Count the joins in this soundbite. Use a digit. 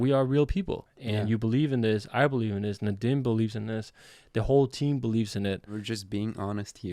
2